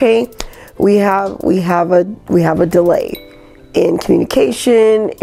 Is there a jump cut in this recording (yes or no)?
no